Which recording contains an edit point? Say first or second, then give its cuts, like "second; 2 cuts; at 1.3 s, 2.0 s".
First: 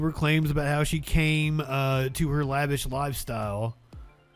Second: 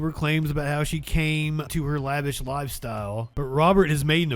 second; 2 cuts; at 1.7 s, 3.3 s